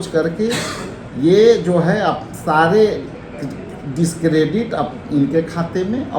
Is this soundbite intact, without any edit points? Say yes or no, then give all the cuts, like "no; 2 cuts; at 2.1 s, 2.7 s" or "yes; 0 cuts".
yes; 0 cuts